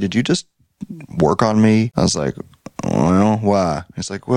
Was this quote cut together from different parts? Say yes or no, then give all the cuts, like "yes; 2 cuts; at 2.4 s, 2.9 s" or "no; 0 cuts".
yes; 1 cut; at 1.9 s